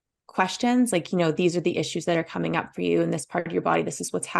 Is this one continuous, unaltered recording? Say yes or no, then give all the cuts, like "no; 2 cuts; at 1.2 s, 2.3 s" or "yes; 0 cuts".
yes; 0 cuts